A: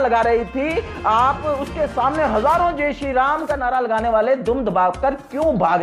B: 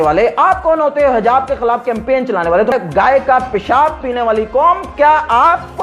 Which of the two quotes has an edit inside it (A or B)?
B